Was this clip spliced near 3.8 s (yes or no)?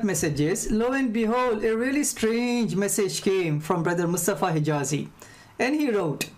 yes